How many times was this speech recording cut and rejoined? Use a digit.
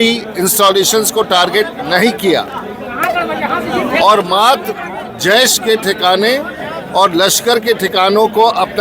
0